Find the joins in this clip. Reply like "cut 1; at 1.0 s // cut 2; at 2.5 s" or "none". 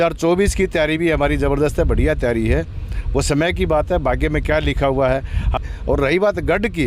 cut 1; at 5.5 s